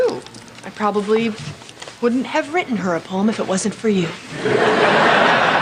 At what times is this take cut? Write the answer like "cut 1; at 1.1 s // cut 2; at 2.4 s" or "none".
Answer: none